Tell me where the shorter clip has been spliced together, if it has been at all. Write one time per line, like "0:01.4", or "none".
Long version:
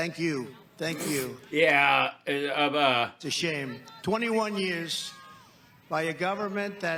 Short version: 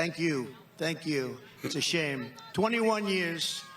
0:01.5